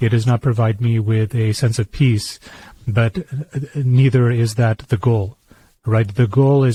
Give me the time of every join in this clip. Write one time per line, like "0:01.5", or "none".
none